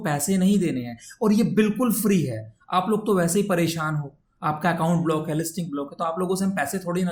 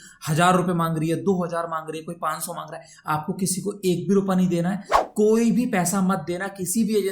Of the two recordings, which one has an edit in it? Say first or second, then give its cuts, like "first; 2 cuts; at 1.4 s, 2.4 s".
second; 1 cut; at 4.9 s